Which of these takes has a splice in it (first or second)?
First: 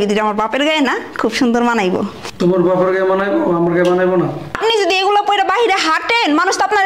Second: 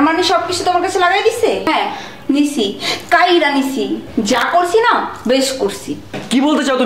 first